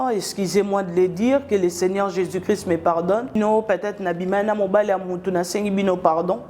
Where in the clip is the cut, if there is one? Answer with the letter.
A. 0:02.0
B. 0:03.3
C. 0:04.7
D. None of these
B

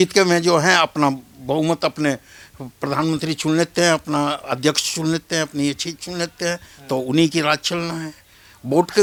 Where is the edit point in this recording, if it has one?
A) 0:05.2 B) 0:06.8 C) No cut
C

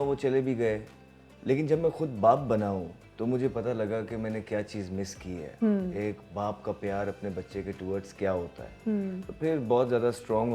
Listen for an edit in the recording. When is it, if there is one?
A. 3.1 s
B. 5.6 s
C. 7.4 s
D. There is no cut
D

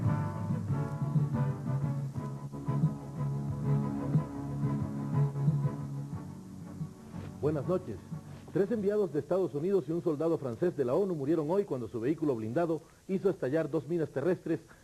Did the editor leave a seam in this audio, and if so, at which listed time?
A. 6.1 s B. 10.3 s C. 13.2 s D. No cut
C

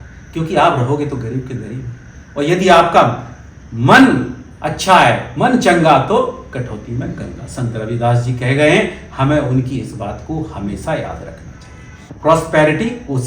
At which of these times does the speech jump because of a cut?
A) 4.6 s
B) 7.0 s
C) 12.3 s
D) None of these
C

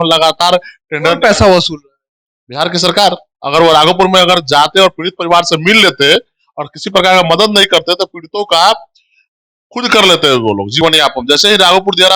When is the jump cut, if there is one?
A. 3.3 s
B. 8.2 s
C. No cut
A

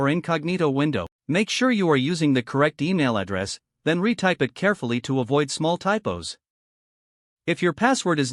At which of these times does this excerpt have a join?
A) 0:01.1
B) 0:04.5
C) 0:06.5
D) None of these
A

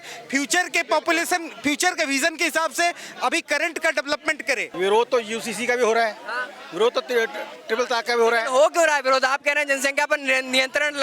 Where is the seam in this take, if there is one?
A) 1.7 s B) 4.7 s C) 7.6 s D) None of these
B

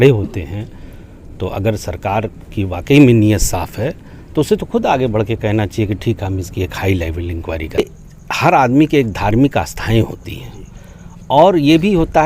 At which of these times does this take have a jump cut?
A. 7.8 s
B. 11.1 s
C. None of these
A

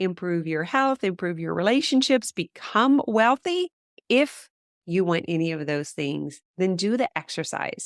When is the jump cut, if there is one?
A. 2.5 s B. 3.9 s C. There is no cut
B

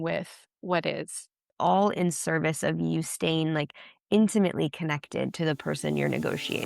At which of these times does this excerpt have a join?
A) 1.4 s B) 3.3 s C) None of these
A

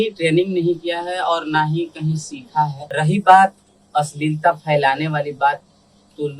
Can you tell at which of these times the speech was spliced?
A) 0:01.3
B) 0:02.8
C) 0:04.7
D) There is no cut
B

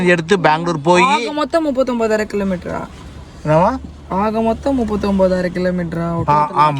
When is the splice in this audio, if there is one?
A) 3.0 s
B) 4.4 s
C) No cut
C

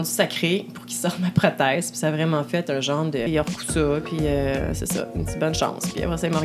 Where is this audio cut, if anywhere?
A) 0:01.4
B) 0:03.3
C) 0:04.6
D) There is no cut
B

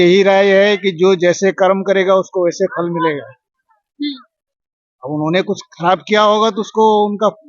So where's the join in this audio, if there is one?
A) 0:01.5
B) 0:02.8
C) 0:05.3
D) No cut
D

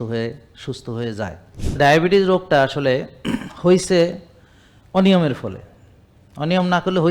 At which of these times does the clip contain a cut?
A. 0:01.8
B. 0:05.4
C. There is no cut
A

